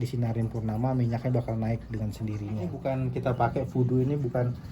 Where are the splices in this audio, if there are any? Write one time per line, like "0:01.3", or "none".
0:02.8